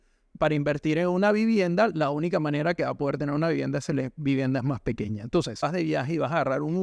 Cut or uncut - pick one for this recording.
cut